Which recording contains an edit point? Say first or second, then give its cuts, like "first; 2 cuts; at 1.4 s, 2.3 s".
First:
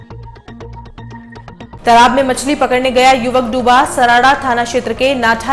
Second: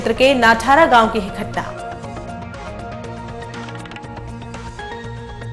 first; 1 cut; at 1.5 s